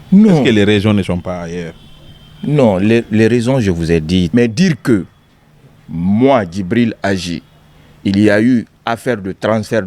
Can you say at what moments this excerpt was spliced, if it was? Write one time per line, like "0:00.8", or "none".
0:04.3